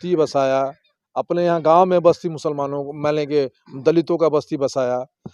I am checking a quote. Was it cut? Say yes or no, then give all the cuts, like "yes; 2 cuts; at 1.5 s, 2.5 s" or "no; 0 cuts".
no; 0 cuts